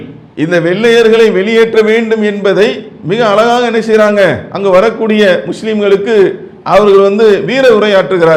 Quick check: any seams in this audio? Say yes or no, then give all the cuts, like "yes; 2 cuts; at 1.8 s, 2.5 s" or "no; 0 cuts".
no; 0 cuts